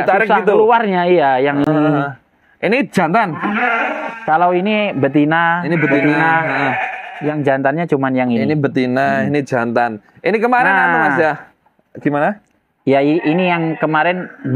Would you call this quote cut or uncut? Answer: uncut